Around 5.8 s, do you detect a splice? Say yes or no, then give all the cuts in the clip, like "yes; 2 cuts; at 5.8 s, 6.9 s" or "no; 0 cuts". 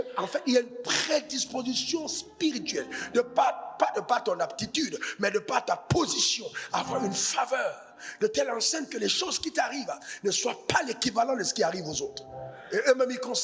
no; 0 cuts